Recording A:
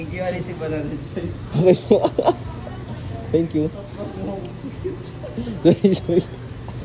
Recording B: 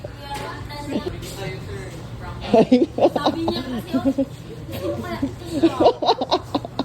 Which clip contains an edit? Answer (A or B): B